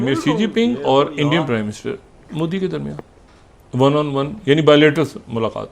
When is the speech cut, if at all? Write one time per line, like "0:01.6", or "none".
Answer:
none